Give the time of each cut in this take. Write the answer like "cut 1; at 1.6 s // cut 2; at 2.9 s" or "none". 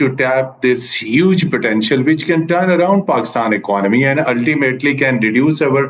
none